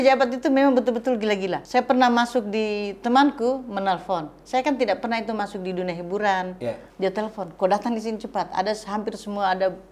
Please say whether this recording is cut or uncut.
cut